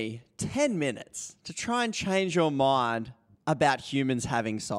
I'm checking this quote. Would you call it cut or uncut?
uncut